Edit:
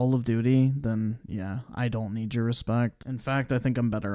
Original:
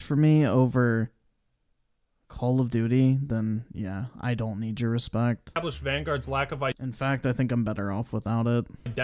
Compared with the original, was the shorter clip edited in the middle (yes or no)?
yes